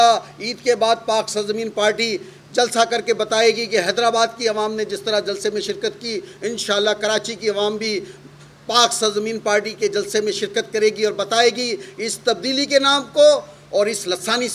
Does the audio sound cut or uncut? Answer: uncut